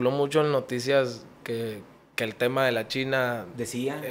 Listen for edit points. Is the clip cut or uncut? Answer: uncut